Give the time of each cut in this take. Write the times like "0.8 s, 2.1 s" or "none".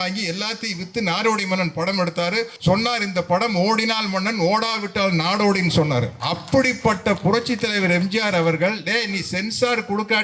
2.5 s, 6.2 s